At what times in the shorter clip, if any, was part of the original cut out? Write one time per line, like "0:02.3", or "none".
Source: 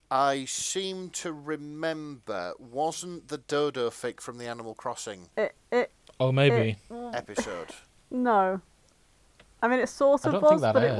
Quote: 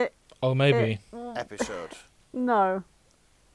none